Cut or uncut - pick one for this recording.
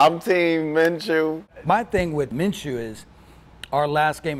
cut